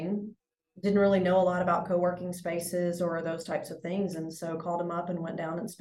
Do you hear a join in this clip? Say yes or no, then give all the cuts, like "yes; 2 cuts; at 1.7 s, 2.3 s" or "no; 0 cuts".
no; 0 cuts